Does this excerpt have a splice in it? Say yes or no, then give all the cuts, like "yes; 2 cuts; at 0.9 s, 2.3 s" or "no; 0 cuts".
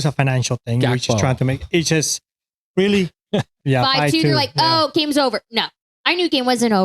yes; 1 cut; at 3.6 s